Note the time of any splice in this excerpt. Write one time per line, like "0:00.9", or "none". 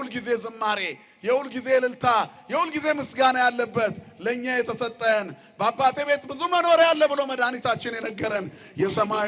none